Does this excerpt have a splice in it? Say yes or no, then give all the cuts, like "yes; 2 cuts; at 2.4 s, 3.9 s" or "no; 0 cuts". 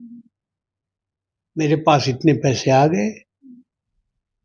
no; 0 cuts